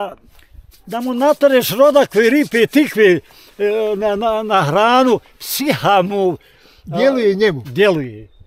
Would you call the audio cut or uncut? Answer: uncut